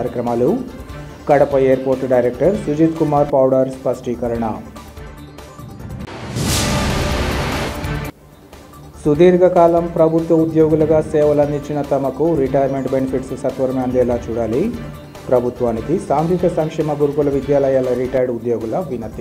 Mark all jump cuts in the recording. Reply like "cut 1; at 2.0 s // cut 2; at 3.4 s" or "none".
none